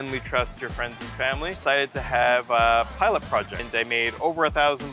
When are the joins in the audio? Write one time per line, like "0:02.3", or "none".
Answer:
0:01.6
0:03.6